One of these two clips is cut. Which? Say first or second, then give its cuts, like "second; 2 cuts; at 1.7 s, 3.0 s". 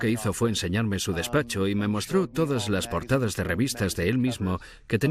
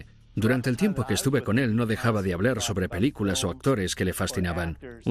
second; 1 cut; at 3.9 s